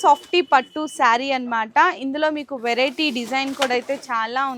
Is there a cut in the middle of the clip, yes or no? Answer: no